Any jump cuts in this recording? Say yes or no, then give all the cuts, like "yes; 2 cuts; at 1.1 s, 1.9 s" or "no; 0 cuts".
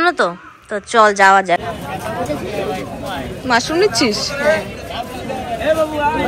yes; 1 cut; at 1.6 s